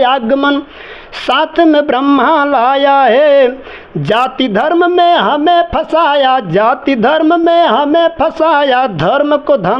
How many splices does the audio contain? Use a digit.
0